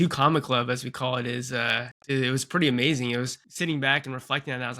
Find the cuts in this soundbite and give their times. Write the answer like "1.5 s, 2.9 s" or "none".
1.9 s, 3.4 s